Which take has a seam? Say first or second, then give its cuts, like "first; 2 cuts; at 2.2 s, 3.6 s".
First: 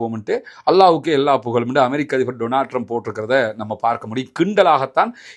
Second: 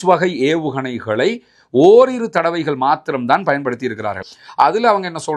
second; 1 cut; at 4.3 s